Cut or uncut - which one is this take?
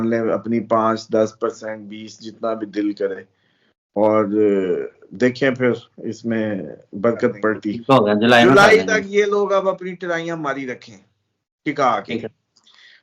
cut